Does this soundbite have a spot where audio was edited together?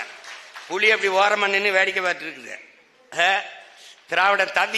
no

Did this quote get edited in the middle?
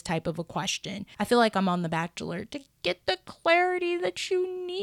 yes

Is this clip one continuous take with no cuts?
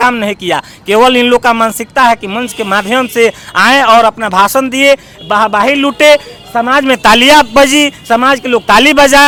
yes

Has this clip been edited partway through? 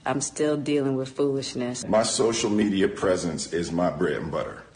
yes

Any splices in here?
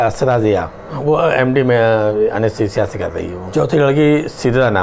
yes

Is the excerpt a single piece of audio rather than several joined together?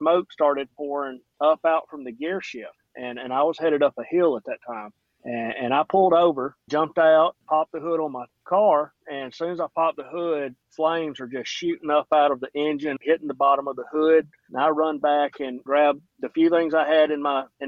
yes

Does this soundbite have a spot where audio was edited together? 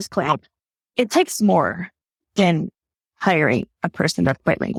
no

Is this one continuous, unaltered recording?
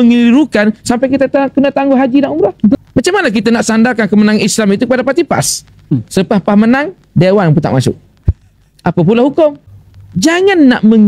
no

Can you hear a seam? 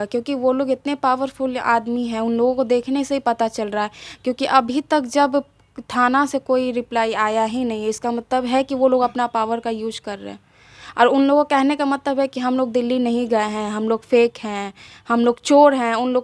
no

